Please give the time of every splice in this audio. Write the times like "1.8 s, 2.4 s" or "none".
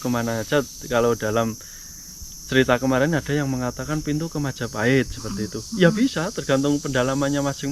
none